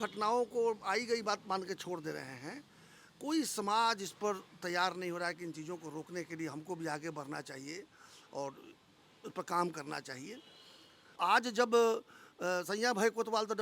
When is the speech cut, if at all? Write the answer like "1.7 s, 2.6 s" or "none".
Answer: 11.2 s

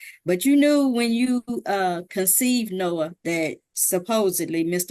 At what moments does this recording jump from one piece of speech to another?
3.7 s

